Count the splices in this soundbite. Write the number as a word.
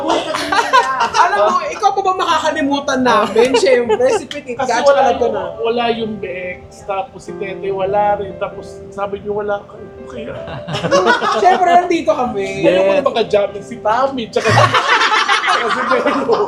zero